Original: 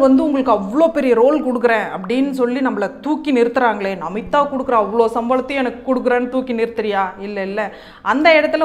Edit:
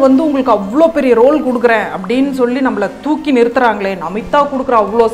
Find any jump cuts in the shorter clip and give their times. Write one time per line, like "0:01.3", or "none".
none